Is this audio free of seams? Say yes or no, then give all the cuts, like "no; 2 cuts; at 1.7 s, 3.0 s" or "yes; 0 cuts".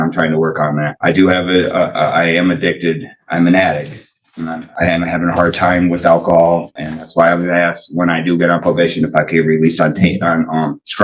yes; 0 cuts